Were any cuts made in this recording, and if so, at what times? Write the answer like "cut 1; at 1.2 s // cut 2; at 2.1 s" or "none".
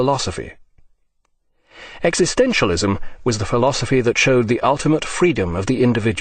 none

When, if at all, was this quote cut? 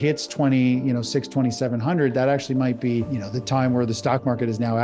cut 1; at 3.1 s

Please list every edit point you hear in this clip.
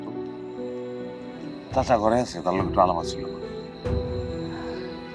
cut 1; at 1.5 s

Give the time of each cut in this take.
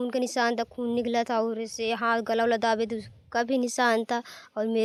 none

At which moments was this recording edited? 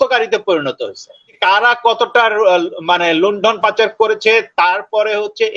cut 1; at 1.3 s

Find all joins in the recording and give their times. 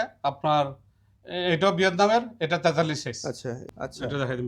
cut 1; at 3.6 s

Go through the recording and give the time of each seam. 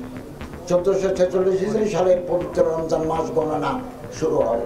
none

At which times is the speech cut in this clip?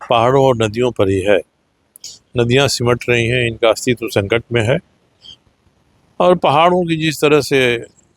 none

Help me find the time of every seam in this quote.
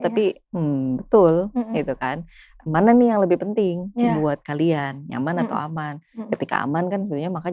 none

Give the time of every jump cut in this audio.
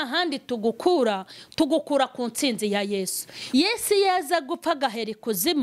cut 1; at 3.3 s

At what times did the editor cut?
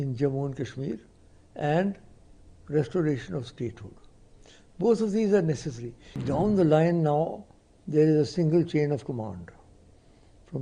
cut 1; at 6.2 s

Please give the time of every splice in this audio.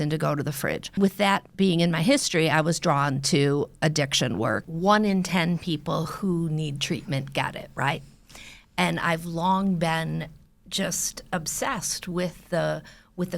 cut 1; at 0.9 s // cut 2; at 4.6 s

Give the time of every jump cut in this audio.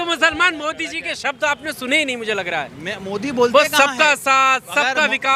none

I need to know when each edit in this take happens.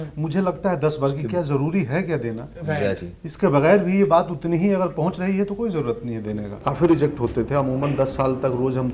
cut 1; at 6.5 s

